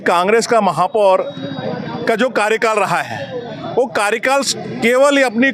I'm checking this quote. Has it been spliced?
no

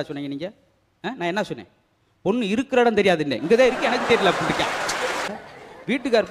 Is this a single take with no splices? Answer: no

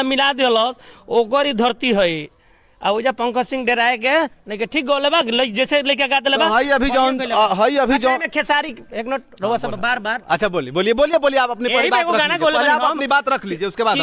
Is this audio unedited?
yes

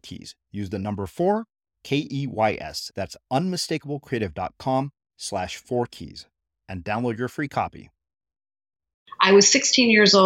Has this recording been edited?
yes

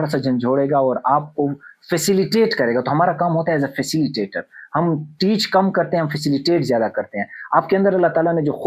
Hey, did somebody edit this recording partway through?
no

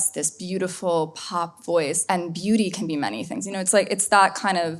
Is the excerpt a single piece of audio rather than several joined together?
no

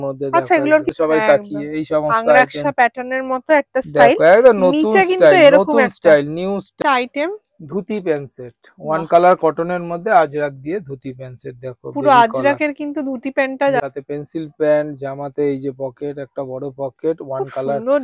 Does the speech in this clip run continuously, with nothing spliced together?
no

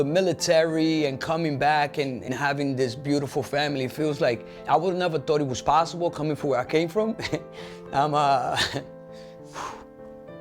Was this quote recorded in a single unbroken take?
no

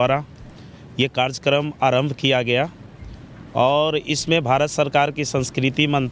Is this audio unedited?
yes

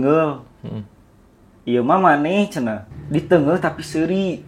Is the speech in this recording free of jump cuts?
no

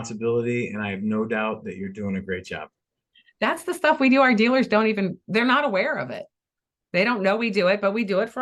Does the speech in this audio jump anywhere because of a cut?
no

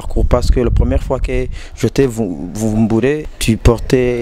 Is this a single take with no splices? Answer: no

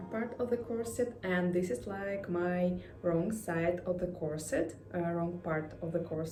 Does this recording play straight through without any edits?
yes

